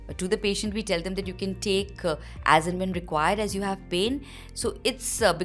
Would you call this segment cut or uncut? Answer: uncut